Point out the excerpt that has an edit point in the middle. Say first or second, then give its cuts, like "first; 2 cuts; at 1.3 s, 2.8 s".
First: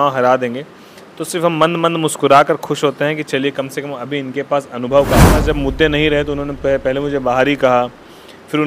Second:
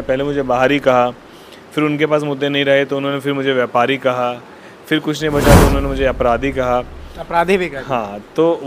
first; 1 cut; at 5.4 s